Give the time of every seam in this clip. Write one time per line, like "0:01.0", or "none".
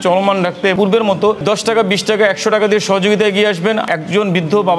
0:00.7
0:03.8